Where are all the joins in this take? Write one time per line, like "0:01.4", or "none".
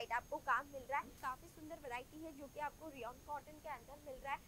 0:01.2

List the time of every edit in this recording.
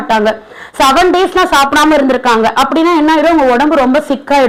none

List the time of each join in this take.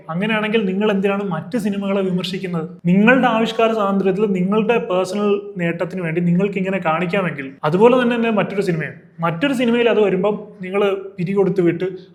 none

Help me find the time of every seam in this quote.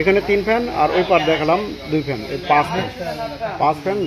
none

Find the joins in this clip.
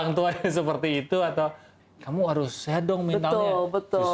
0:01.7

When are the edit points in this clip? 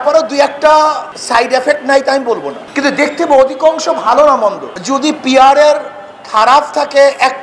0:01.1
0:02.6
0:04.7

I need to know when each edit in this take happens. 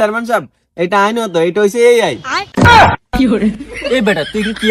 0:02.7

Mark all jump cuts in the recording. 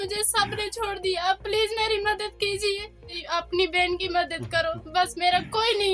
0:03.2

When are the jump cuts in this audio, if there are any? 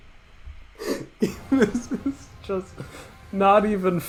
none

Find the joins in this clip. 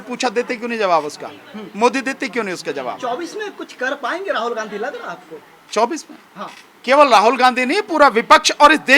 none

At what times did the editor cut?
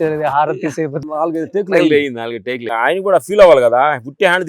0:01.0
0:02.7

